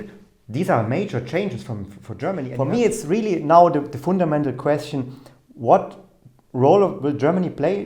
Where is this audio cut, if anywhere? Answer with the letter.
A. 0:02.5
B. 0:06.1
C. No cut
A